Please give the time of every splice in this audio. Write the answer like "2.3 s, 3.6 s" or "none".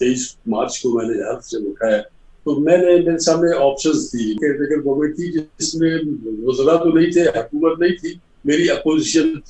4.4 s